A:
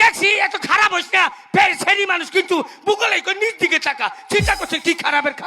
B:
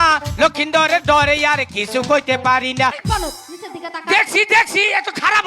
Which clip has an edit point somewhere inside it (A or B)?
B